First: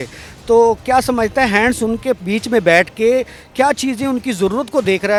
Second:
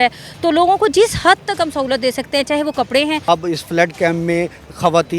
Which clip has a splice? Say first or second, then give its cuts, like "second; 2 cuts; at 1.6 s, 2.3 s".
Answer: second; 1 cut; at 3.2 s